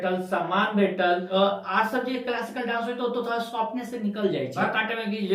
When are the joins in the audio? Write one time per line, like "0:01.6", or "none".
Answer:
0:01.3
0:04.5